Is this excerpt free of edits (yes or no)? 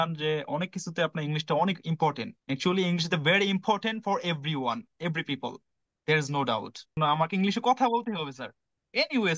yes